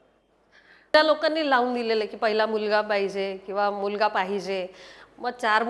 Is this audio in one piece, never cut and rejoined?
no; 1 cut; at 0.9 s

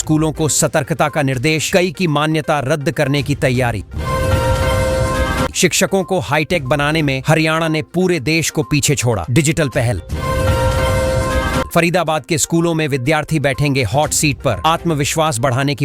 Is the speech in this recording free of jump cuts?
no; 4 cuts; at 3.9 s, 5.5 s, 10.1 s, 11.7 s

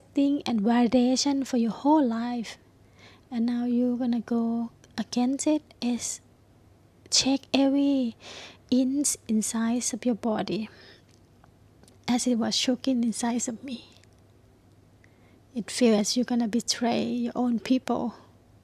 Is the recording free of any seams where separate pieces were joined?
yes; 0 cuts

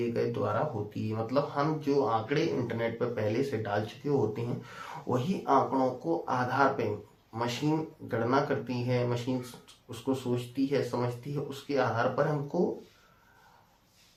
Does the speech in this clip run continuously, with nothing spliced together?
yes; 0 cuts

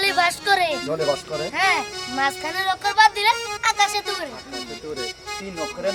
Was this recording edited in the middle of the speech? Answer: no; 0 cuts

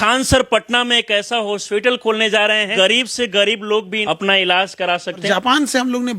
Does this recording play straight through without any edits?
no; 3 cuts; at 2.7 s, 3.9 s, 5.2 s

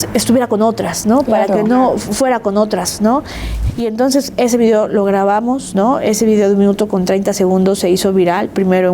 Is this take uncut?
no; 1 cut; at 3.5 s

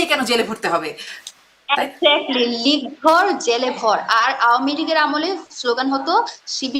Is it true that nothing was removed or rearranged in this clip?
yes; 0 cuts

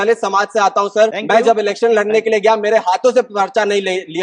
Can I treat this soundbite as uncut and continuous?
no; 1 cut; at 1.2 s

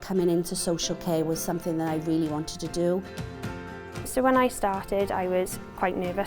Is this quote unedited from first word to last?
no; 1 cut; at 3.4 s

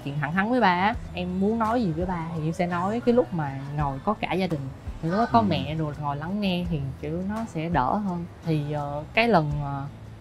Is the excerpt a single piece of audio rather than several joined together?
yes; 0 cuts

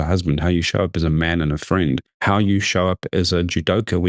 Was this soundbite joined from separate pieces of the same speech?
yes; 1 cut; at 2.1 s

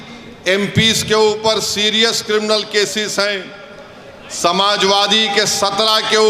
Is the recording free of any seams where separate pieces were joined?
yes; 0 cuts

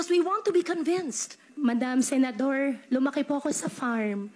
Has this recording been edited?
yes; 1 cut; at 1.5 s

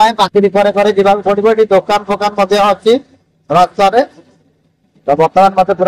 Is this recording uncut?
yes; 0 cuts

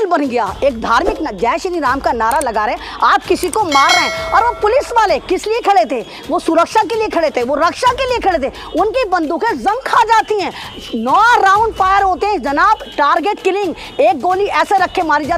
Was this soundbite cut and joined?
no; 0 cuts

